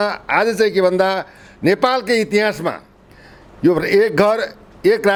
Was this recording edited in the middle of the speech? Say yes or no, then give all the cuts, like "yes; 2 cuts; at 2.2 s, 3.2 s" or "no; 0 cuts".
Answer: no; 0 cuts